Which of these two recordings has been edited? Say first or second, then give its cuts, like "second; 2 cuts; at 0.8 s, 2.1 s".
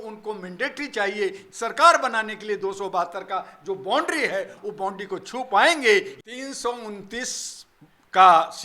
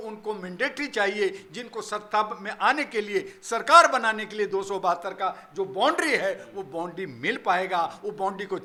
first; 3 cuts; at 1.4 s, 4.6 s, 6.1 s